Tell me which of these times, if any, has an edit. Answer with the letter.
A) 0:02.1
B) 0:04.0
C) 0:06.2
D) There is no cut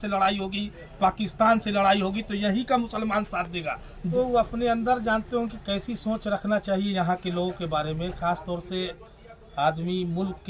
B